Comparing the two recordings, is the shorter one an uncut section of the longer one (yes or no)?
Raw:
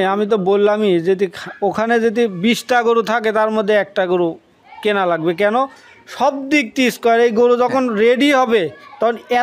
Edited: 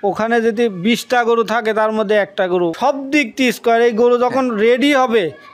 no